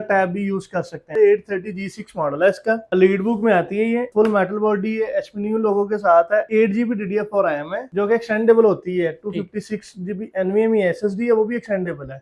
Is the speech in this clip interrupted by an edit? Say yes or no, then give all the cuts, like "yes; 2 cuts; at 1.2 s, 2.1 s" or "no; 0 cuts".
yes; 2 cuts; at 1.0 s, 4.1 s